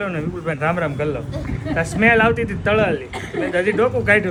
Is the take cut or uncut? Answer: uncut